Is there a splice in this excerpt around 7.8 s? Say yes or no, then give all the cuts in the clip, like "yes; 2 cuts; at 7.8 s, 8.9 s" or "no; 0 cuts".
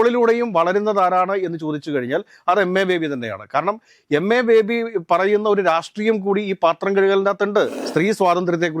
yes; 1 cut; at 7.8 s